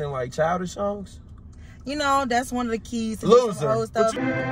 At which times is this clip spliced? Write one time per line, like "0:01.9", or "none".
none